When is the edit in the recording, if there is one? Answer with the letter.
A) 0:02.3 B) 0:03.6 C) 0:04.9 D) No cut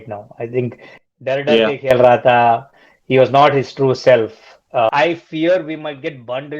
C